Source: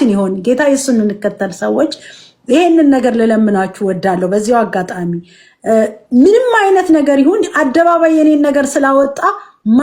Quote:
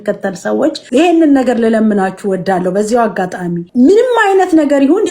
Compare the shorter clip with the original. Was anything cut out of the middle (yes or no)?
yes